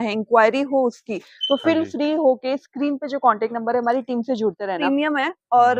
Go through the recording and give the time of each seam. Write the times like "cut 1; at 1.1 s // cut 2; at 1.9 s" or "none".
cut 1; at 4.8 s